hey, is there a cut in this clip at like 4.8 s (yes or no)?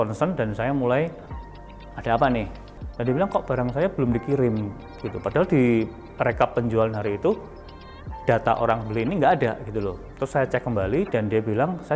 no